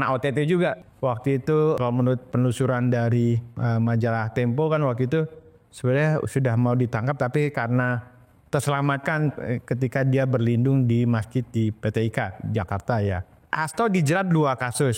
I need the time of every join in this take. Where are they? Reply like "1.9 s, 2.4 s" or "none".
0.9 s, 1.8 s, 13.3 s